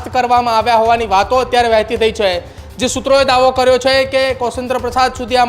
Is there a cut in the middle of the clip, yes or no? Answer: no